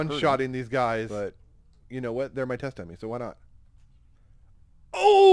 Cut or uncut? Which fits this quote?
cut